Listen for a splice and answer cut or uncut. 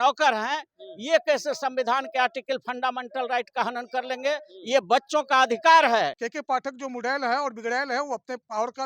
cut